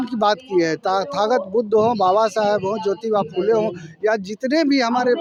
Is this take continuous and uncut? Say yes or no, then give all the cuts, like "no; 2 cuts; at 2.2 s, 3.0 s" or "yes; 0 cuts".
yes; 0 cuts